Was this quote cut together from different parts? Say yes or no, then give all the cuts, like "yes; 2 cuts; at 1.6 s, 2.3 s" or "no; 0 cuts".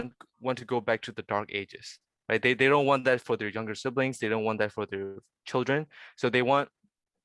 no; 0 cuts